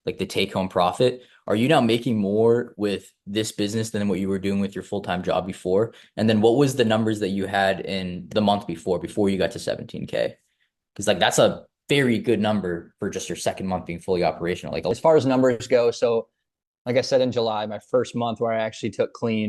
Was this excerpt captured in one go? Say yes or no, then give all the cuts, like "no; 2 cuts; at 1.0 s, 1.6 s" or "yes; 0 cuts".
no; 1 cut; at 14.9 s